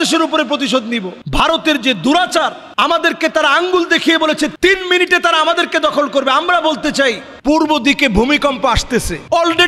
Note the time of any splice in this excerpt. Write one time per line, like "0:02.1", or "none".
0:01.1
0:04.5